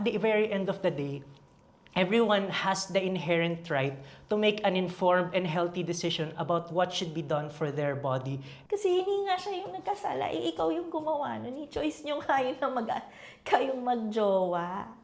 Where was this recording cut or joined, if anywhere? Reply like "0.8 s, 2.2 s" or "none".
8.5 s